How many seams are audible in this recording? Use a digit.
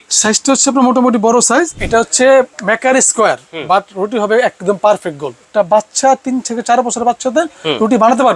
2